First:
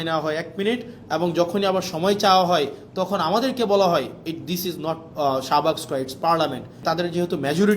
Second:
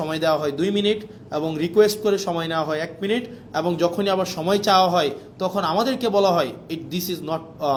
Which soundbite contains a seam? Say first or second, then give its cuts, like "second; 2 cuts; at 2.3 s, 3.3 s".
first; 1 cut; at 6.8 s